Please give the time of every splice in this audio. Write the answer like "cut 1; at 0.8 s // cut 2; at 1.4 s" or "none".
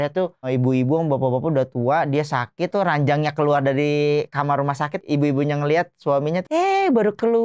cut 1; at 2.7 s // cut 2; at 5.0 s // cut 3; at 6.4 s